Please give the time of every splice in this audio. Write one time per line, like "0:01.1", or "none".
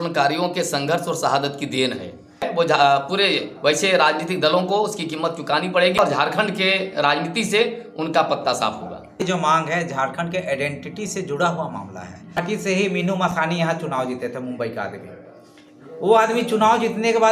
0:02.5
0:06.0
0:09.2
0:12.4